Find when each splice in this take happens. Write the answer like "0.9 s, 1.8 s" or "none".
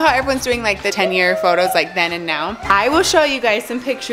0.9 s, 2.5 s